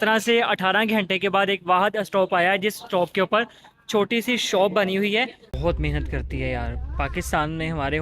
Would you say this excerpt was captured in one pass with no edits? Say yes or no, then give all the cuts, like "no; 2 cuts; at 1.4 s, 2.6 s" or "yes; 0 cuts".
no; 1 cut; at 5.4 s